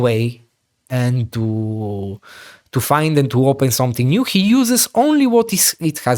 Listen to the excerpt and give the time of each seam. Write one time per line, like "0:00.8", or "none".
none